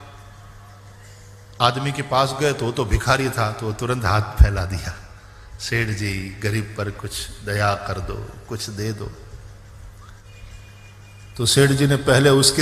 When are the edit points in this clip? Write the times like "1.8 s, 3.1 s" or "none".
10.2 s